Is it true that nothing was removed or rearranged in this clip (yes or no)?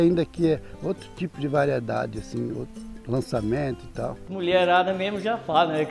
no